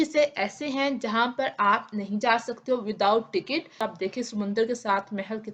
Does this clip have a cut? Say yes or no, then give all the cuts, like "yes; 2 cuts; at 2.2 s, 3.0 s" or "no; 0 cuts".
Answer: yes; 1 cut; at 3.8 s